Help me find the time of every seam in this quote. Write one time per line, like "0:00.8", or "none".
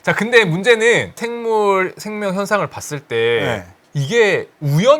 0:01.2